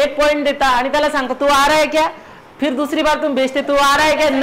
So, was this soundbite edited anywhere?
no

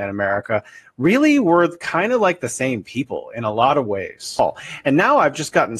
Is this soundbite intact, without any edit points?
no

